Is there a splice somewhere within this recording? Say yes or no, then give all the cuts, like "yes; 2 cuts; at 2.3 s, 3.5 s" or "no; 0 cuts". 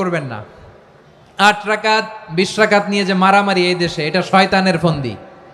no; 0 cuts